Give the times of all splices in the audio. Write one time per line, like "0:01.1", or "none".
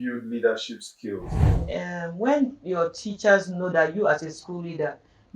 0:01.5

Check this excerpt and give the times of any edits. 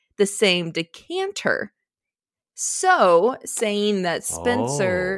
none

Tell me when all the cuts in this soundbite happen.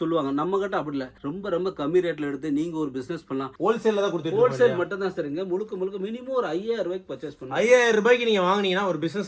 0:03.5

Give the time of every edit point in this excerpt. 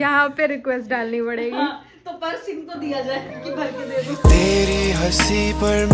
0:04.2

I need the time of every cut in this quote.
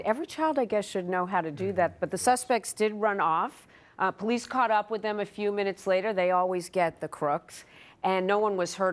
none

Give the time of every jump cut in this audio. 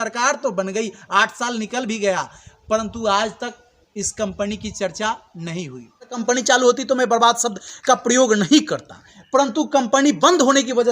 0:06.2

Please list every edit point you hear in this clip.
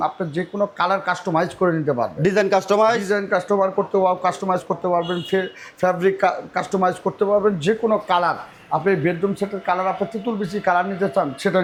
none

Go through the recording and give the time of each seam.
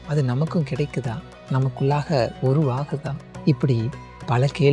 0:01.3
0:03.2

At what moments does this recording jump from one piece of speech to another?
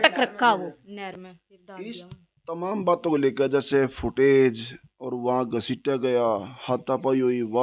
none

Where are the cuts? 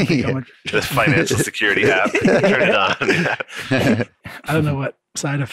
0:04.3

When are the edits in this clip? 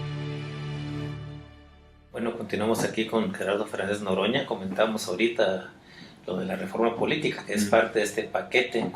0:03.1

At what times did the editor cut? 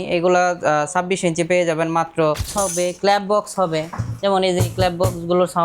0:02.5

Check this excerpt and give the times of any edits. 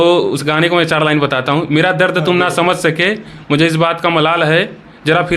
none

